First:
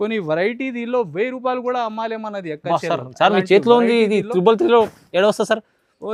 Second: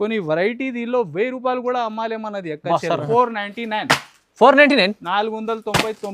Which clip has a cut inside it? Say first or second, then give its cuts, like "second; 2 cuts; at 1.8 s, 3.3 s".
second; 1 cut; at 3.0 s